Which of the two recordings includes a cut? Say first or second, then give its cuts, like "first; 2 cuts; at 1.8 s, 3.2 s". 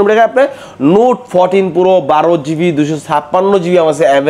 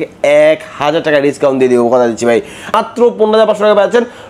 second; 1 cut; at 2.7 s